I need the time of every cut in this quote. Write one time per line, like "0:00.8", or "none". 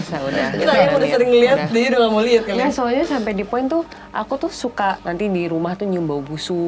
0:05.0